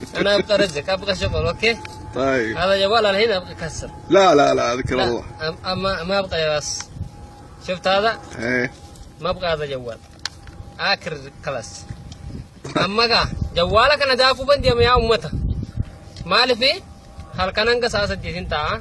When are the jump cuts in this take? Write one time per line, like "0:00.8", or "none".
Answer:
0:15.9